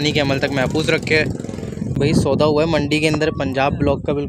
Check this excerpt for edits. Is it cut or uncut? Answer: cut